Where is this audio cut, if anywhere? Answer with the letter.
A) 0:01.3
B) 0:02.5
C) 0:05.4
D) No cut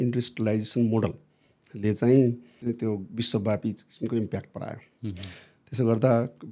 B